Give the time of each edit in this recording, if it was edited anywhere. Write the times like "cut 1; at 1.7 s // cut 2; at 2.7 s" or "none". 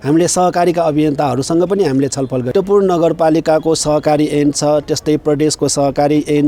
cut 1; at 2.5 s

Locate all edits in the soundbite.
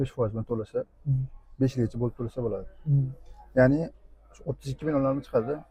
none

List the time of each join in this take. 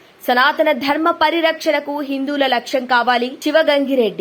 none

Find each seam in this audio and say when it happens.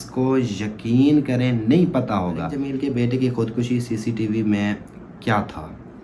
cut 1; at 2.6 s

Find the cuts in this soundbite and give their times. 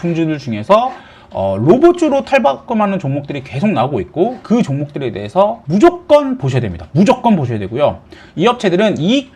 none

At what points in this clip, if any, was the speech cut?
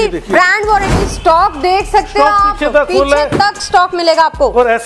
cut 1; at 0.9 s

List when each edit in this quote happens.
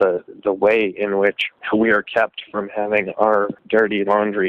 cut 1; at 1.5 s // cut 2; at 3.6 s

